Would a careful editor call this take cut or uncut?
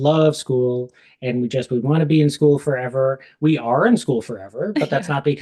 uncut